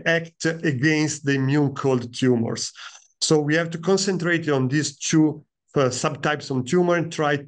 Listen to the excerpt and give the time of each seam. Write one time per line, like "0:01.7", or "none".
none